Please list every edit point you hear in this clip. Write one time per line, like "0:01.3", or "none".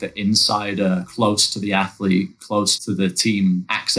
0:01.1